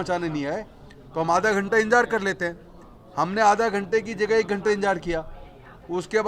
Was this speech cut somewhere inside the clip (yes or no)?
no